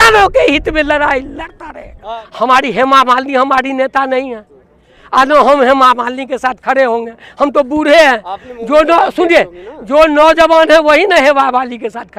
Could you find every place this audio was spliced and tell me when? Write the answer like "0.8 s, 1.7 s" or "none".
2.2 s